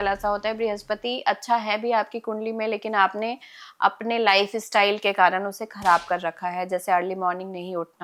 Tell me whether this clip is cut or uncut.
uncut